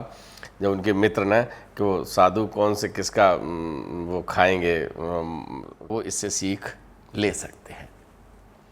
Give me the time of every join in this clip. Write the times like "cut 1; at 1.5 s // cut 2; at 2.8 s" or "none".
cut 1; at 5.9 s